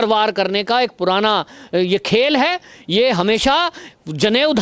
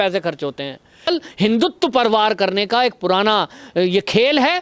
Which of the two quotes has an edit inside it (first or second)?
second